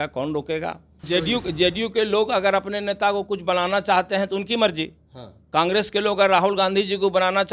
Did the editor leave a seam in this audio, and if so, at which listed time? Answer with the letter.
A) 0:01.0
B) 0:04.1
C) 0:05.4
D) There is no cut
A